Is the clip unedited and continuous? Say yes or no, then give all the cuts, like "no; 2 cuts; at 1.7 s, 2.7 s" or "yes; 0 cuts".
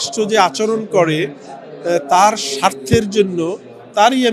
yes; 0 cuts